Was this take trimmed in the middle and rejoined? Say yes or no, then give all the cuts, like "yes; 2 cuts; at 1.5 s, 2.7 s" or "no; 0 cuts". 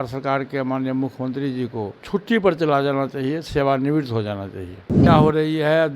yes; 2 cuts; at 2.0 s, 5.1 s